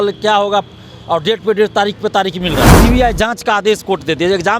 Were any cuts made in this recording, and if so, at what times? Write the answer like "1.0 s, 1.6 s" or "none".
2.8 s